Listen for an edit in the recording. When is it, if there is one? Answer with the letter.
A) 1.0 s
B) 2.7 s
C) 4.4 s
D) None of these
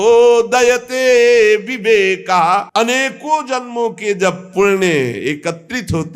B